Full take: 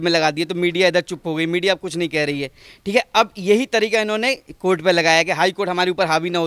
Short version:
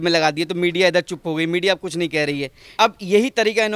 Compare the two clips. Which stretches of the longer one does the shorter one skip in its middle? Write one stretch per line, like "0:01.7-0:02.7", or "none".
0:02.7-0:03.1